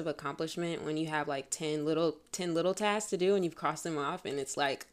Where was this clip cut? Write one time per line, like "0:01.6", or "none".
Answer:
none